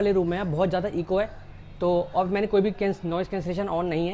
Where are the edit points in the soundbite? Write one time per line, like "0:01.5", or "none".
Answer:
none